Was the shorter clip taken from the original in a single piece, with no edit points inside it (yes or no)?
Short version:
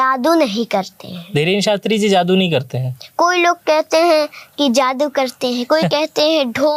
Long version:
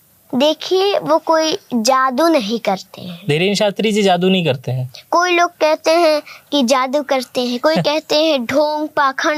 yes